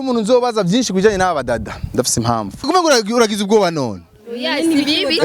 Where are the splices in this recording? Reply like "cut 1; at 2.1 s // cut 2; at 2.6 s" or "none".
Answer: cut 1; at 2.6 s